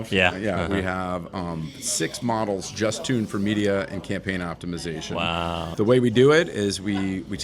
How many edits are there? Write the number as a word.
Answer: one